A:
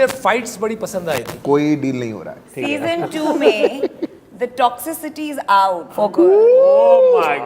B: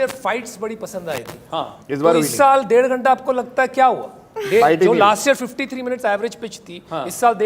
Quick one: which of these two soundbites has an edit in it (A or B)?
A